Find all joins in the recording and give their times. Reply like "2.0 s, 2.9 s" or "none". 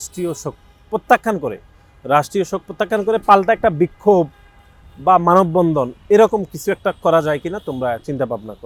none